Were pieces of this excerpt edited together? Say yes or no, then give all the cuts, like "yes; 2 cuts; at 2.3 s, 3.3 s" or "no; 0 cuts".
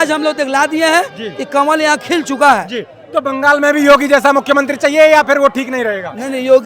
no; 0 cuts